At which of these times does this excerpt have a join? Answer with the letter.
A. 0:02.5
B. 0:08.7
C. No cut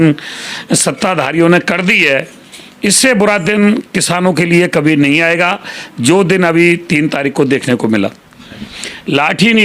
B